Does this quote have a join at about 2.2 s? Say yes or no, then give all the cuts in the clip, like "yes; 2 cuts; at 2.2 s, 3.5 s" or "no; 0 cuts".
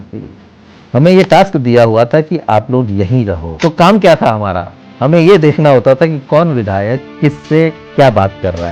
no; 1 cut; at 3.5 s